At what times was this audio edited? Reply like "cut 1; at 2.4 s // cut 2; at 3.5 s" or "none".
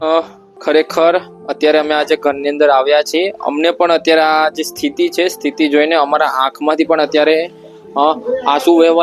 none